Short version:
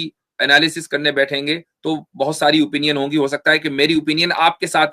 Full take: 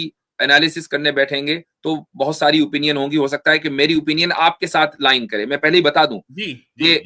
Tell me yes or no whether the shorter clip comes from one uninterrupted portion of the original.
yes